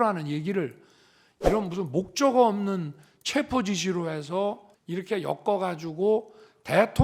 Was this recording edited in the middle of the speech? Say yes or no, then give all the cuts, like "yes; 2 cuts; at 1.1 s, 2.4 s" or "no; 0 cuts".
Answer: yes; 1 cut; at 4.7 s